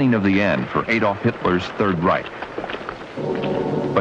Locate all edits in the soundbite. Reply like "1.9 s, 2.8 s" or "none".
none